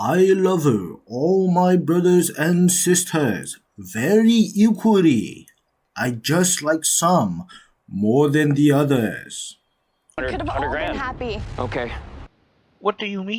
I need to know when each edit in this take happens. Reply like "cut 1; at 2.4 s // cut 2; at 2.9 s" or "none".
cut 1; at 10.2 s